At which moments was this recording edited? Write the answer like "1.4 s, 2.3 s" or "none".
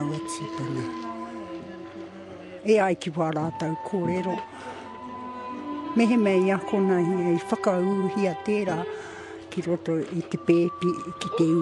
none